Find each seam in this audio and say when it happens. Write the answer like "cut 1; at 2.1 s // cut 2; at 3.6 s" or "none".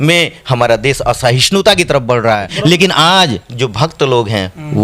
cut 1; at 2.5 s